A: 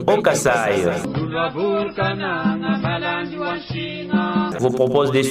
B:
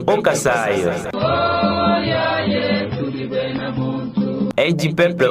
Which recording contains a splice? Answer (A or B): A